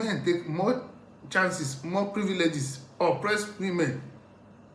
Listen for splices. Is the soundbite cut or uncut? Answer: uncut